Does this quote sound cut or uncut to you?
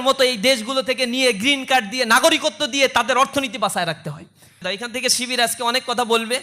cut